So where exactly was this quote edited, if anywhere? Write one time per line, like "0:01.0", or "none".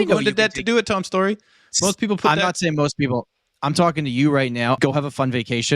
0:04.8